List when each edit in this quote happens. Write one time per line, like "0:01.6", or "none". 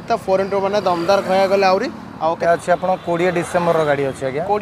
0:02.4